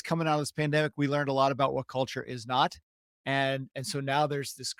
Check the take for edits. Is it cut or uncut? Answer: uncut